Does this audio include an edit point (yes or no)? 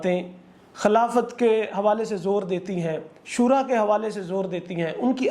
no